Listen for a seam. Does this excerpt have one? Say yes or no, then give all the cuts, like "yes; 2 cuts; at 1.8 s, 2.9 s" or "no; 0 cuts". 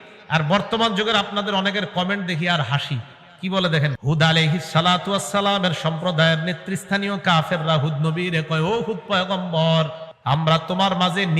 yes; 2 cuts; at 4.0 s, 10.1 s